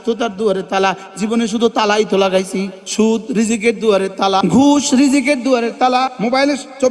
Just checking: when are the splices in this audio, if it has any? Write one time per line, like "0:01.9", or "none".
0:02.8
0:04.4
0:06.1